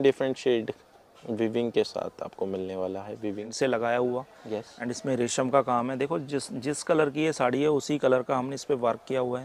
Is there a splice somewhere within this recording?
yes; 1 cut; at 3.5 s

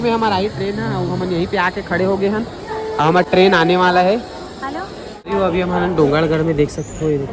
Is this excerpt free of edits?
no; 1 cut; at 5.3 s

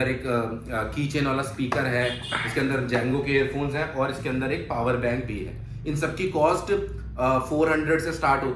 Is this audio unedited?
yes; 0 cuts

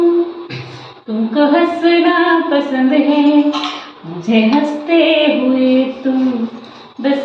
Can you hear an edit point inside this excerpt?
no; 0 cuts

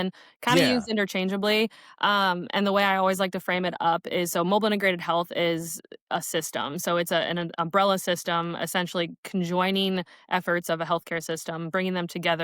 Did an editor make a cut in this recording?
no; 0 cuts

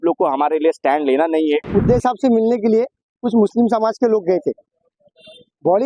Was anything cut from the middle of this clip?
yes; 1 cut; at 1.7 s

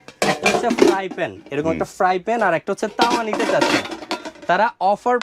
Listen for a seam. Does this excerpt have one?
no; 0 cuts

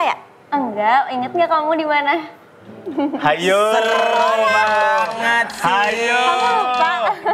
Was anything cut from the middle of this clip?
no; 0 cuts

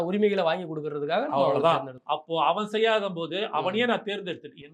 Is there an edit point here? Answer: no; 0 cuts

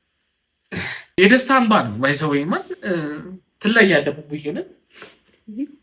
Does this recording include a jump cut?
yes; 1 cut; at 1.2 s

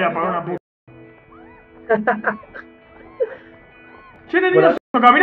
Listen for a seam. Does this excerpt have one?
no; 0 cuts

